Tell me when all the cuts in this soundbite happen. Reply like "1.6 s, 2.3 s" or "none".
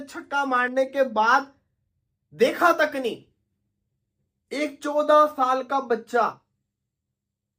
none